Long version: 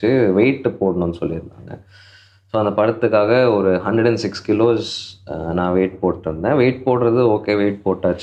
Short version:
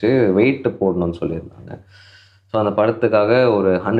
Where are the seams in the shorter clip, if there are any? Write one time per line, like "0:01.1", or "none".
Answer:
none

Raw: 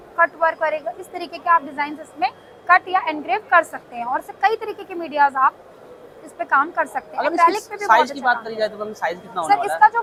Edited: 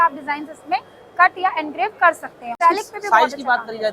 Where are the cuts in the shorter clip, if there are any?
0:02.6

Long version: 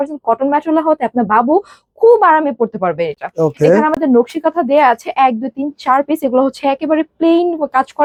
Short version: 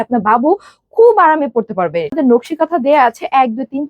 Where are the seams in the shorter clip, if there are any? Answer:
0:02.1

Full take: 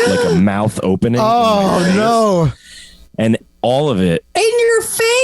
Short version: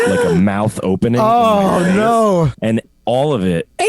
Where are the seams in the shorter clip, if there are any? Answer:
0:02.5

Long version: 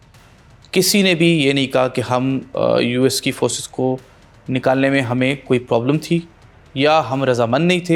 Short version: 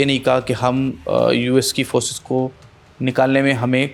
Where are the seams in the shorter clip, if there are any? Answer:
none

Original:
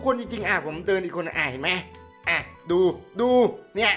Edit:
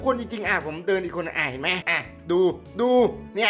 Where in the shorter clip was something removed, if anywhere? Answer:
0:01.9

